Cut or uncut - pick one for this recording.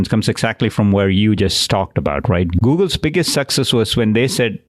cut